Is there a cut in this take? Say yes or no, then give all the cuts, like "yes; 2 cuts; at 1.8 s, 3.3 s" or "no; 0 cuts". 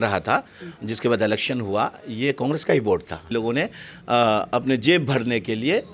yes; 1 cut; at 3.3 s